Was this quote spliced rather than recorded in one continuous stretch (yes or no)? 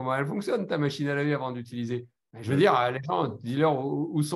no